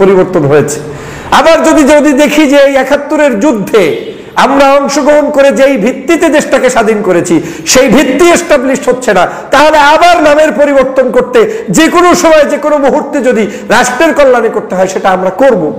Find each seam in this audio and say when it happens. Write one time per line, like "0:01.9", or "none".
none